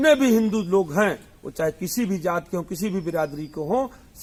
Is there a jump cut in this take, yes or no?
no